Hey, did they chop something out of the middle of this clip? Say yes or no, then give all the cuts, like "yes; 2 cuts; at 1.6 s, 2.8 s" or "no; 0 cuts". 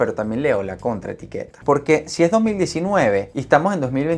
yes; 2 cuts; at 1.6 s, 3.3 s